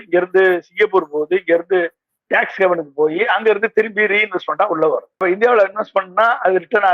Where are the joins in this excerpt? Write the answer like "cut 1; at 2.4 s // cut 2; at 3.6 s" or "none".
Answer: cut 1; at 5.2 s